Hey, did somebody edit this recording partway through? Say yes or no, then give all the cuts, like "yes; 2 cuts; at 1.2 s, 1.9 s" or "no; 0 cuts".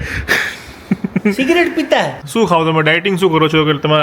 yes; 1 cut; at 2.2 s